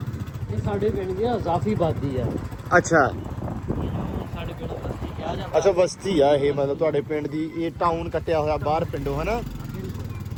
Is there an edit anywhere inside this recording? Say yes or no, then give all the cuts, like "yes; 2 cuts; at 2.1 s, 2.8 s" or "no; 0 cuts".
no; 0 cuts